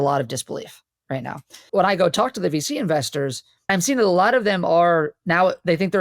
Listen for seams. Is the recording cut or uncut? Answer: cut